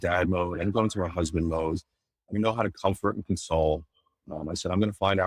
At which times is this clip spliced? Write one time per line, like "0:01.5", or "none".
none